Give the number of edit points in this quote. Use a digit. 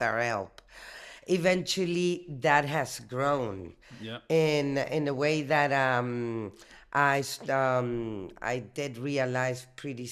0